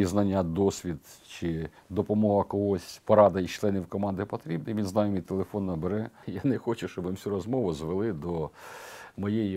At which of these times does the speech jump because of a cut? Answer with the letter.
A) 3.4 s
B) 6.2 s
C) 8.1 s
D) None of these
B